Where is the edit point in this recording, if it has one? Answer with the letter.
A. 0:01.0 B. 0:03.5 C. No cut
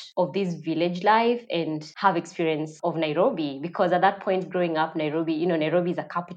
C